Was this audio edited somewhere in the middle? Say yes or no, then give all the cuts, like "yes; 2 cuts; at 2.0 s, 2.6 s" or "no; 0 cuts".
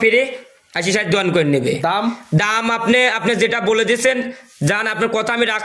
no; 0 cuts